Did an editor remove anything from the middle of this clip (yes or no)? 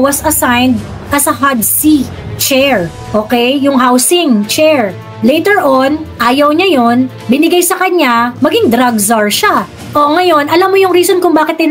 no